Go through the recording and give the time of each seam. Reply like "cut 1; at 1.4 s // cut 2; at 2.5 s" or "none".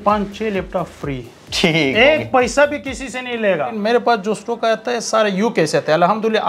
cut 1; at 3.7 s